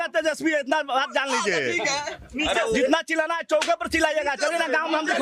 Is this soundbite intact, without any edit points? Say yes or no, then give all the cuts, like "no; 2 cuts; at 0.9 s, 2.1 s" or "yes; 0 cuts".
yes; 0 cuts